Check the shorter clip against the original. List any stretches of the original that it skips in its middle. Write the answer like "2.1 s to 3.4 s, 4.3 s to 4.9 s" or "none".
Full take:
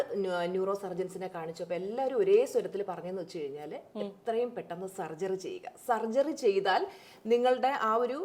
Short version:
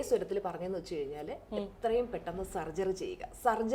none